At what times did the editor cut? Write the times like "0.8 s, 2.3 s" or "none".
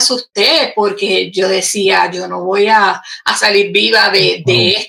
none